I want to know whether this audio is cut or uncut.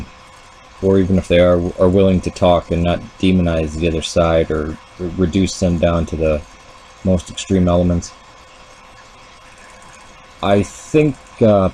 uncut